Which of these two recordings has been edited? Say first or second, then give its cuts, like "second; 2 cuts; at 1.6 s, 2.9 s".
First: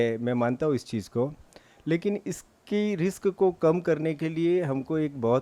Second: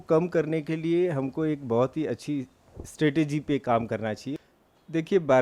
second; 1 cut; at 4.3 s